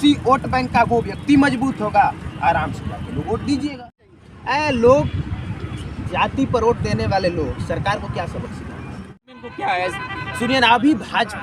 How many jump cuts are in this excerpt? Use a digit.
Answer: 2